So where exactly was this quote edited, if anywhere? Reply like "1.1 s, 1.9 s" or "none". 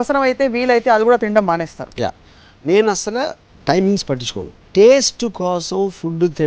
4.6 s